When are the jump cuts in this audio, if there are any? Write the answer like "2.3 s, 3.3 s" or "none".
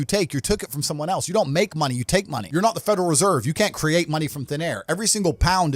2.4 s